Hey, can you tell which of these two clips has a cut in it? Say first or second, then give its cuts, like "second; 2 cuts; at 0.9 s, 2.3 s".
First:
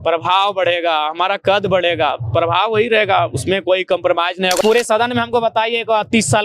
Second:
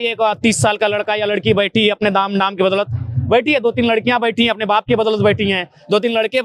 first; 1 cut; at 4.6 s